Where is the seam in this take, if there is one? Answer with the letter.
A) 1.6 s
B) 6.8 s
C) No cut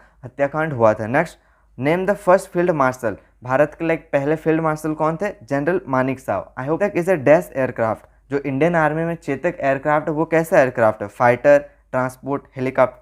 B